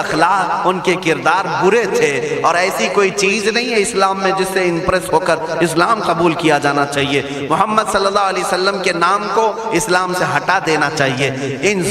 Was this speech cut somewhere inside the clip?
no; 0 cuts

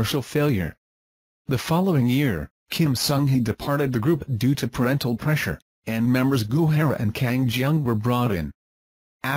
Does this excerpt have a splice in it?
yes; 1 cut; at 2.3 s

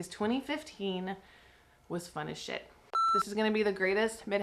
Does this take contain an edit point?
yes; 1 cut; at 3.1 s

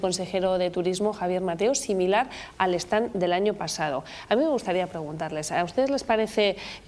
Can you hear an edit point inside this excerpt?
yes; 1 cut; at 3.6 s

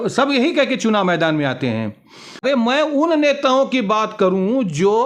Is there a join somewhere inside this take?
yes; 1 cut; at 2.4 s

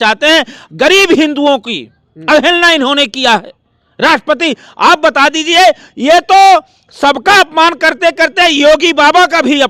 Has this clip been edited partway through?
no; 0 cuts

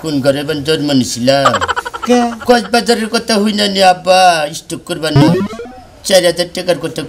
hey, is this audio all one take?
yes; 0 cuts

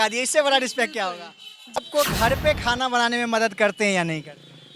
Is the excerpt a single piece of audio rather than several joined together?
no; 1 cut; at 1.8 s

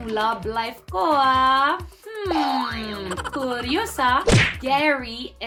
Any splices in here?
no; 0 cuts

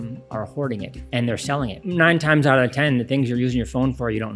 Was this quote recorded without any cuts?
no; 1 cut; at 1.2 s

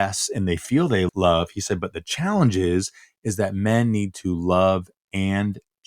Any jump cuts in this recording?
yes; 1 cut; at 1.1 s

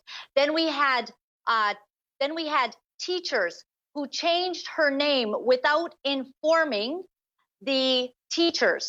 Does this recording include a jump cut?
no; 0 cuts

